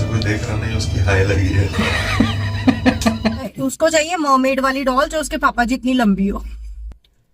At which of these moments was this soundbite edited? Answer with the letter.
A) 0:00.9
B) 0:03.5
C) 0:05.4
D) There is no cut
B